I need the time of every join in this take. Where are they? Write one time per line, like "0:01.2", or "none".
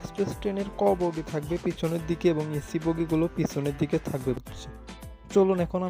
0:04.4